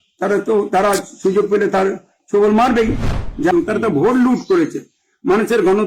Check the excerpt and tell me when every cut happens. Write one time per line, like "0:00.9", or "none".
0:03.5